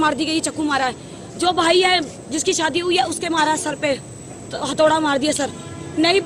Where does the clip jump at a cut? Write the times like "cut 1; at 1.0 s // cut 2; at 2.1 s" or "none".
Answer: none